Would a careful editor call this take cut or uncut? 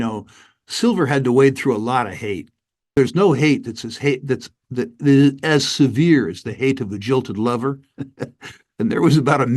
cut